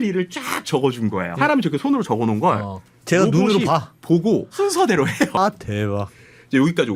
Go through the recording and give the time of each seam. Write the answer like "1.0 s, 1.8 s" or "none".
1.3 s, 4.5 s, 5.4 s